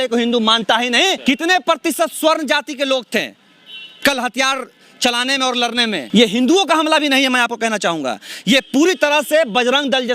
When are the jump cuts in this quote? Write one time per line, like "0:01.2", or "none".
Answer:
0:01.2
0:06.0